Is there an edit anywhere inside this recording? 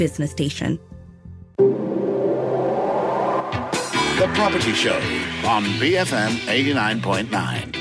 yes; 1 cut; at 1.1 s

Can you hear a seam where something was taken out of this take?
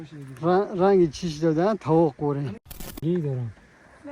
yes; 1 cut; at 3.0 s

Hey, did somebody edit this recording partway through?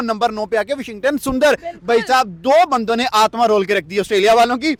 no; 0 cuts

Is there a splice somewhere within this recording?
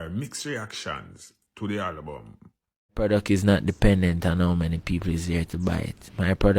yes; 1 cut; at 2.9 s

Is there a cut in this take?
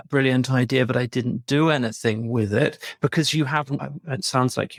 no; 0 cuts

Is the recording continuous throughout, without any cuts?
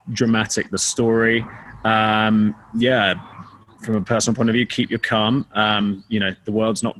yes; 0 cuts

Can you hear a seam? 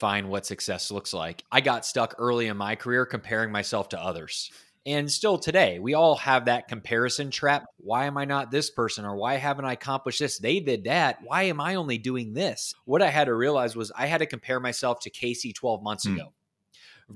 yes; 3 cuts; at 1.4 s, 7.7 s, 12.7 s

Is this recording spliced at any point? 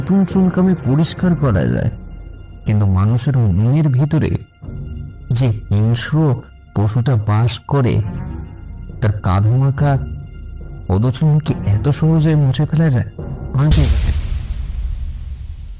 yes; 1 cut; at 13.9 s

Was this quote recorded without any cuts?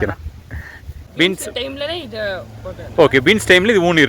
no; 1 cut; at 0.9 s

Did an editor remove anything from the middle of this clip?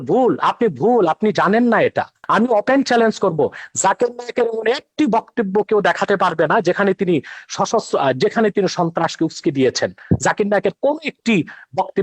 yes; 1 cut; at 2.2 s

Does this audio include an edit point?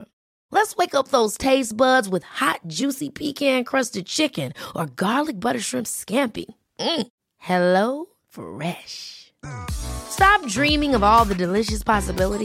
no; 0 cuts

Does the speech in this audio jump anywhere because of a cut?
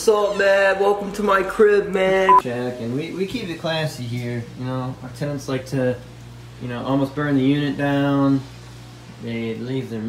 yes; 1 cut; at 2.4 s

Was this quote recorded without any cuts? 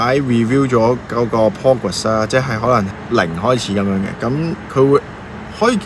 no; 1 cut; at 2.9 s

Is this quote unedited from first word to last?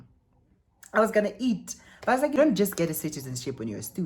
no; 1 cut; at 2.4 s

